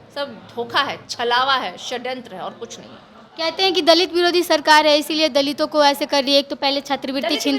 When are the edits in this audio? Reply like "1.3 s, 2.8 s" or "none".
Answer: none

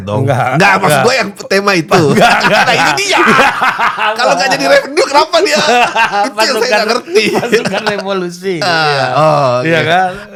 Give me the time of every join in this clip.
none

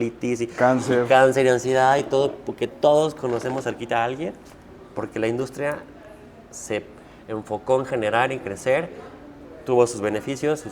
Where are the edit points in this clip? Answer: none

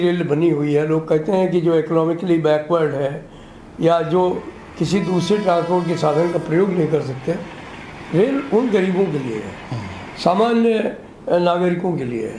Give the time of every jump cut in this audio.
none

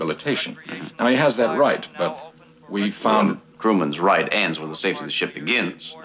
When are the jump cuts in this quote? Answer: 2.2 s

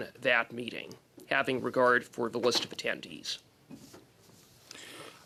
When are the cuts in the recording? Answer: none

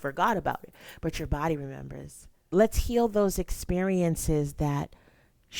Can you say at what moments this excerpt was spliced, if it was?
2.4 s

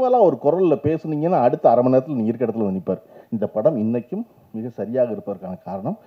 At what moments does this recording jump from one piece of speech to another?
3.1 s

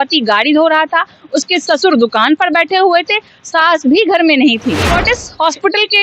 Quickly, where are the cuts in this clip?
4.9 s

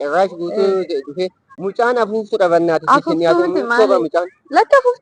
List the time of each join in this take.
1.5 s

